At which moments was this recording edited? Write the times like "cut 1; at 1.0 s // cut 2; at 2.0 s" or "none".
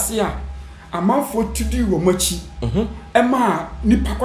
none